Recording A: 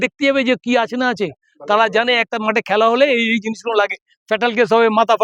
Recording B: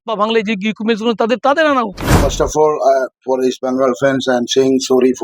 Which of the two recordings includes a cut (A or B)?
B